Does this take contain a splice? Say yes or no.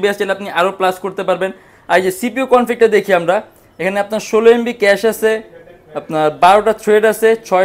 no